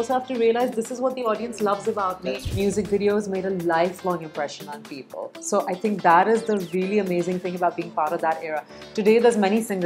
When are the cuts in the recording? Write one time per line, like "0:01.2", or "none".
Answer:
0:02.5